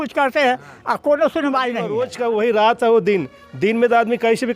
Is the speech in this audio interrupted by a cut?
yes; 1 cut; at 2.0 s

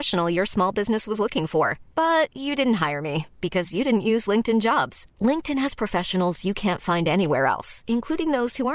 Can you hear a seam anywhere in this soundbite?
no; 0 cuts

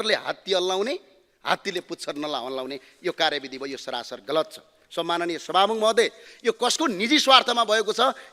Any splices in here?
no; 0 cuts

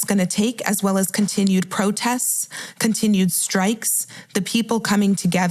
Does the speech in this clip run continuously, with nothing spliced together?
yes; 0 cuts

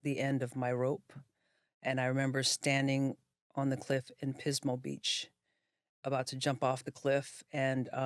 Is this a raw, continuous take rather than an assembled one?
yes; 0 cuts

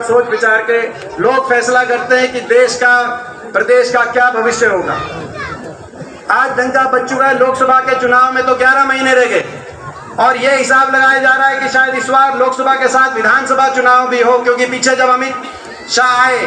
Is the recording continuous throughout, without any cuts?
yes; 0 cuts

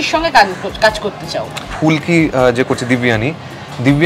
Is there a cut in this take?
yes; 1 cut; at 1.7 s

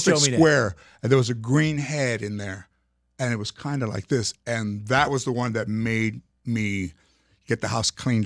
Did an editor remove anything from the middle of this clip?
no; 0 cuts

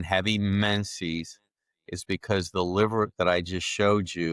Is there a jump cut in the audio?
no; 0 cuts

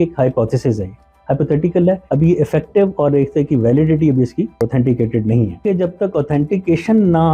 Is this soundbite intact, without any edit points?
no; 3 cuts; at 2.0 s, 4.6 s, 5.6 s

